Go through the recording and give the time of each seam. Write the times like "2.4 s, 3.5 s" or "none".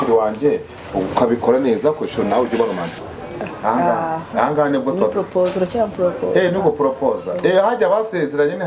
2.9 s